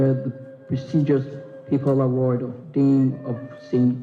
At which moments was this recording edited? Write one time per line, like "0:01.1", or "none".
none